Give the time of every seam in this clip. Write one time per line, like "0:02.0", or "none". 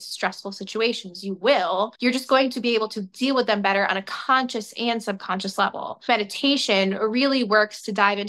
0:01.9
0:06.0